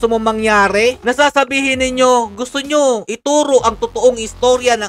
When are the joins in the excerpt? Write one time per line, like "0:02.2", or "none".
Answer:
none

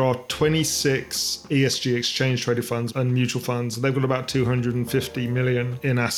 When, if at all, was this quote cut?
0:01.4
0:02.9

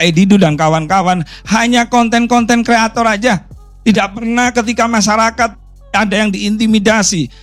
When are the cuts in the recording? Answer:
none

